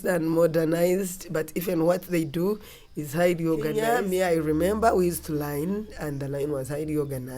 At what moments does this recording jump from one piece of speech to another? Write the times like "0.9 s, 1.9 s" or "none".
3.9 s